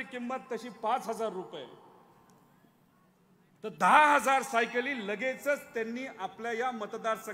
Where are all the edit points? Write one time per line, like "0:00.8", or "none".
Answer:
none